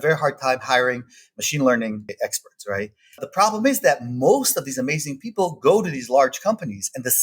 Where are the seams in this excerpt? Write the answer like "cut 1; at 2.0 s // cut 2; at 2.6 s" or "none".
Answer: cut 1; at 2.1 s // cut 2; at 3.2 s